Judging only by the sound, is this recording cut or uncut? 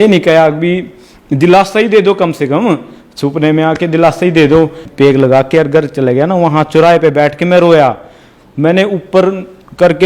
cut